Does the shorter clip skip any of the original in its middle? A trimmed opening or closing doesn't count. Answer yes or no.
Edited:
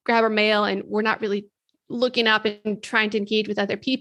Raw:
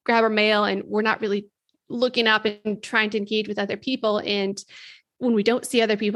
no